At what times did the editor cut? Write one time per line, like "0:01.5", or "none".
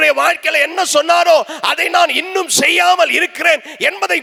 none